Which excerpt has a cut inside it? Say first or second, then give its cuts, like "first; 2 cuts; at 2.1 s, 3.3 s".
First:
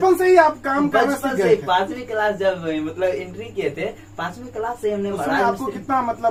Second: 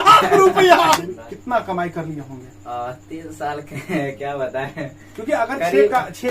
second; 1 cut; at 1.0 s